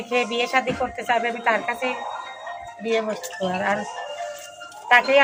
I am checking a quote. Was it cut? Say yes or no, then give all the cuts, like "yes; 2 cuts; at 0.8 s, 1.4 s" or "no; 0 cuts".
no; 0 cuts